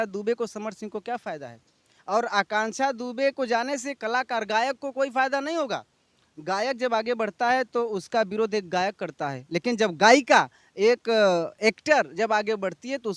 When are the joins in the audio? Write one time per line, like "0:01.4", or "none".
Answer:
none